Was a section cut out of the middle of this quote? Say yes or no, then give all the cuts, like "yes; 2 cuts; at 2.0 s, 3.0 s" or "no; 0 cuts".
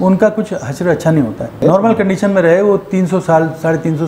yes; 1 cut; at 1.5 s